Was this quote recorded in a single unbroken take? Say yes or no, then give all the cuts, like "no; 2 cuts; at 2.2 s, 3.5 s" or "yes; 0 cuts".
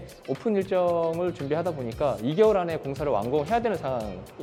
yes; 0 cuts